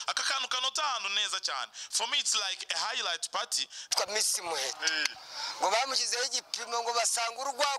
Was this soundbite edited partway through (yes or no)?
yes